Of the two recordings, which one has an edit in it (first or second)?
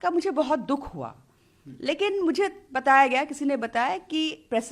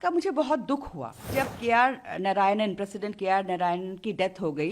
second